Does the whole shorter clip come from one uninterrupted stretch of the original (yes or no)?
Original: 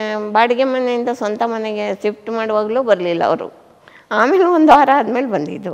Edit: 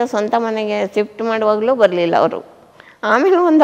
yes